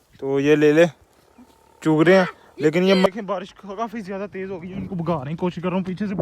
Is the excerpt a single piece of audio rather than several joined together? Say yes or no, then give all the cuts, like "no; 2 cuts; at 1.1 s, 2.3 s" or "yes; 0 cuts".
no; 1 cut; at 3.1 s